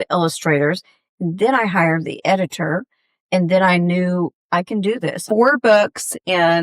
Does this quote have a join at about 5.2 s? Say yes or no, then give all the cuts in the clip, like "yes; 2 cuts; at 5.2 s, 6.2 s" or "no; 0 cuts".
yes; 1 cut; at 5.2 s